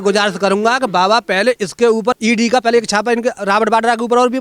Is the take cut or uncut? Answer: uncut